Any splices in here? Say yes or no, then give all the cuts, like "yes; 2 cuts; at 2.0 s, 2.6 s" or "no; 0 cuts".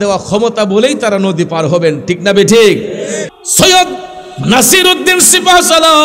yes; 1 cut; at 3.3 s